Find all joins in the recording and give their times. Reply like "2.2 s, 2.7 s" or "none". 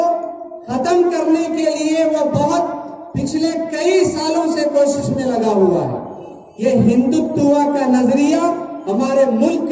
none